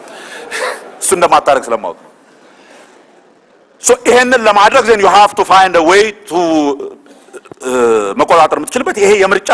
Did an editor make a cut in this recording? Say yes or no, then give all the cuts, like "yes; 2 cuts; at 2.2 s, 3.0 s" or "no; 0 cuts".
no; 0 cuts